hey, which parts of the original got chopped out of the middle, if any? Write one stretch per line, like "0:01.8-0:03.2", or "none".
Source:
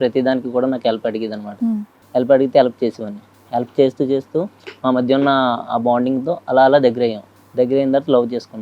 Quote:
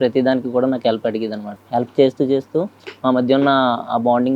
0:01.4-0:03.2